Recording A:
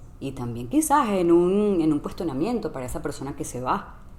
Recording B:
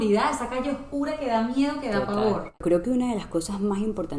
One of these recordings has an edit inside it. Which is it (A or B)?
B